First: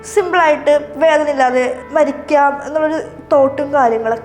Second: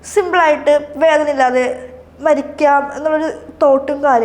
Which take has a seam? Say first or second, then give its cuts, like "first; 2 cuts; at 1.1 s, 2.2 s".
first; 1 cut; at 1.8 s